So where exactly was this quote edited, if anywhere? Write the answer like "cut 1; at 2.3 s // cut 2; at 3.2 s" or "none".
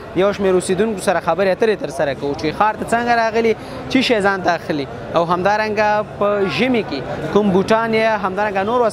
none